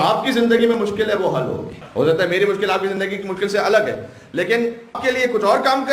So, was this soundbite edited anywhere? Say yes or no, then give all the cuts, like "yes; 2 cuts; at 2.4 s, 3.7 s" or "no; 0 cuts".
yes; 2 cuts; at 1.8 s, 5.0 s